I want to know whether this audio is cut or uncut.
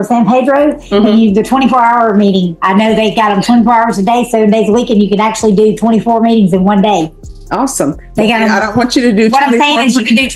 uncut